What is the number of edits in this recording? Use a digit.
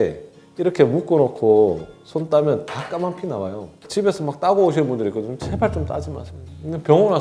1